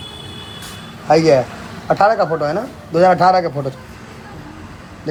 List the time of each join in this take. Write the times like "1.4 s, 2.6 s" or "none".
none